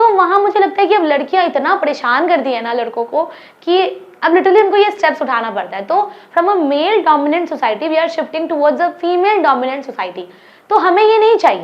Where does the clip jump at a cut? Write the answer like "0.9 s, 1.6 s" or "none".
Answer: none

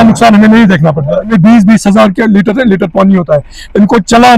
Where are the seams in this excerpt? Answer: 1.3 s

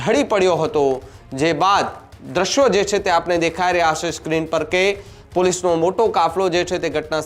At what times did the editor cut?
none

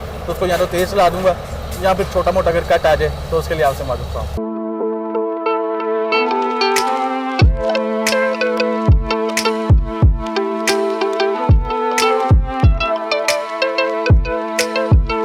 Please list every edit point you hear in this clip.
none

